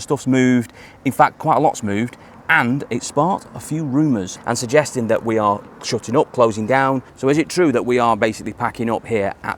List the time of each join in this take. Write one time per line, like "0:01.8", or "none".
0:04.4
0:07.1